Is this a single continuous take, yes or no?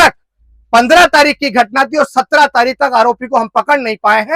yes